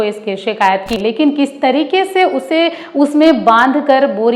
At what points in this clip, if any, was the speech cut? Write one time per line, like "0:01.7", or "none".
0:00.9